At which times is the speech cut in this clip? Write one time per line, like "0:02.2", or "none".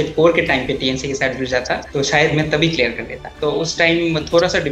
0:01.8
0:03.2